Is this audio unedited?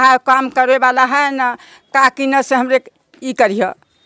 yes; 0 cuts

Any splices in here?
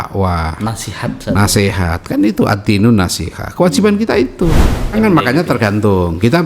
yes; 1 cut; at 4.9 s

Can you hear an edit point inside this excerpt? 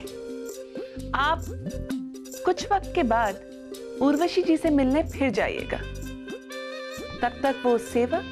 no; 0 cuts

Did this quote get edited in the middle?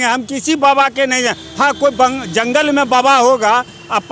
no; 0 cuts

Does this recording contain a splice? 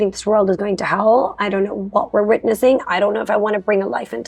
no; 0 cuts

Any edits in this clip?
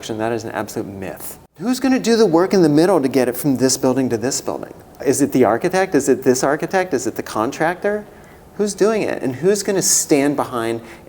yes; 2 cuts; at 1.7 s, 5.0 s

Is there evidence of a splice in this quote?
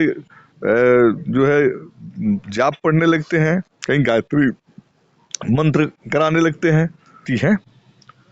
yes; 1 cut; at 7.3 s

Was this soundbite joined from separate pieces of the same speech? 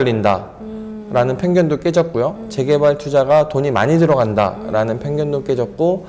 no; 0 cuts

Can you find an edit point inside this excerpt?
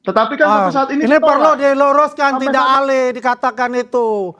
yes; 1 cut; at 2.8 s

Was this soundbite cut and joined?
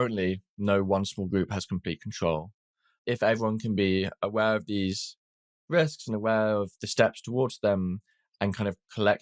yes; 1 cut; at 2.9 s

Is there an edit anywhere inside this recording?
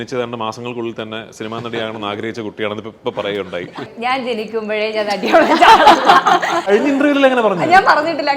yes; 2 cuts; at 3.9 s, 6.7 s

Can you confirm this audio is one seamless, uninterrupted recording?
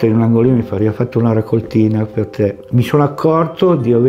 no; 2 cuts; at 0.8 s, 2.6 s

